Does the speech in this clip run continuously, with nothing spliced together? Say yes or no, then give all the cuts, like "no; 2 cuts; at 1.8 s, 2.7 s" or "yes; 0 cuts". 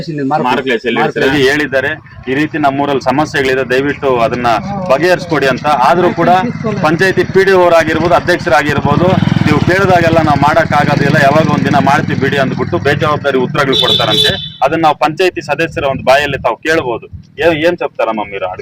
no; 1 cut; at 1.3 s